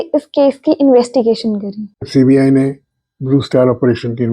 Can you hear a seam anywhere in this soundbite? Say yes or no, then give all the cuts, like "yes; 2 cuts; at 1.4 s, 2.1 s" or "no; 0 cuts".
yes; 1 cut; at 2.1 s